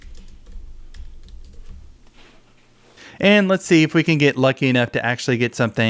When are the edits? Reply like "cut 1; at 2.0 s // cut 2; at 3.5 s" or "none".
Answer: none